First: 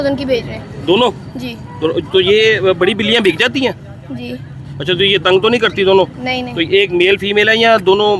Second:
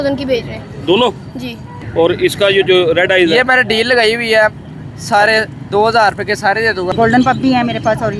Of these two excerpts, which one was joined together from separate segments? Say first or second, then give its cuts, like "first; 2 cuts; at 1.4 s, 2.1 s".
second; 2 cuts; at 1.7 s, 6.9 s